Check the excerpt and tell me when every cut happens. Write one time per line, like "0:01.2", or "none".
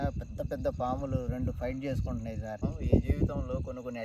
0:02.6